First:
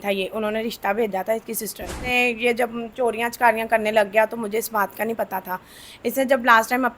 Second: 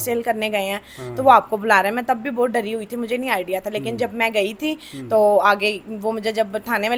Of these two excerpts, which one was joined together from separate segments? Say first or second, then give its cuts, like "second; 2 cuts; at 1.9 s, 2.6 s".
first; 1 cut; at 2.0 s